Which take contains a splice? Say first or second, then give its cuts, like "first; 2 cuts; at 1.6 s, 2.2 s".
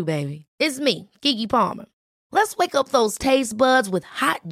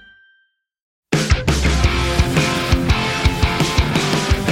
second; 1 cut; at 1.1 s